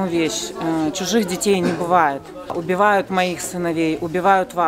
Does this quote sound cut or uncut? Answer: cut